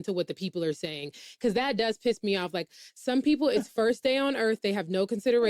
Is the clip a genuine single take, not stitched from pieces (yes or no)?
yes